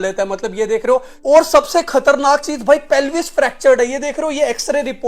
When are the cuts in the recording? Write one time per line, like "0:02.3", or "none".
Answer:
0:01.1

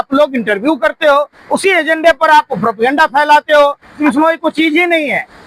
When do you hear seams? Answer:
0:03.9

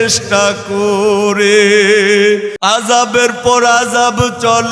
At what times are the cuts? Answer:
0:02.5

